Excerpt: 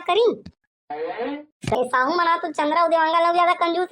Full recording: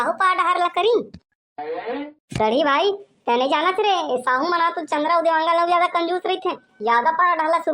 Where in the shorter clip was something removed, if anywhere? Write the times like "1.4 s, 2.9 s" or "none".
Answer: 1.7 s